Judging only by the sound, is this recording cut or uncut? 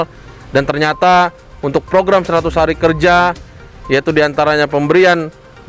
uncut